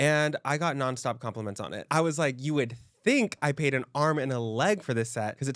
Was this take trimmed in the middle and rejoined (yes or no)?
yes